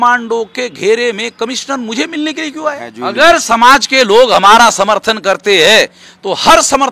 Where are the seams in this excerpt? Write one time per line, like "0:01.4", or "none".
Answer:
0:02.9